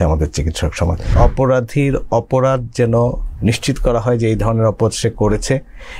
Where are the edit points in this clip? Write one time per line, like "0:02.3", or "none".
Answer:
0:01.1